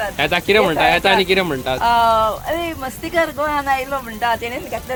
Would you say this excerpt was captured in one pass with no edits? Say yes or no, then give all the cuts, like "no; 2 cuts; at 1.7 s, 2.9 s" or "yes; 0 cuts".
yes; 0 cuts